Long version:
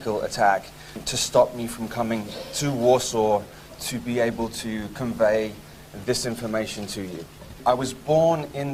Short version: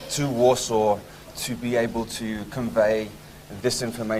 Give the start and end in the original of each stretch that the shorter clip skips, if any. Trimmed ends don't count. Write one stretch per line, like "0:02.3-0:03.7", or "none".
none